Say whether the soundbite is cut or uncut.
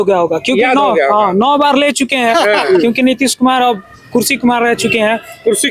cut